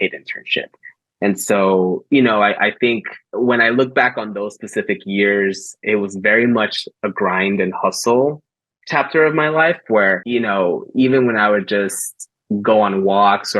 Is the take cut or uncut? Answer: cut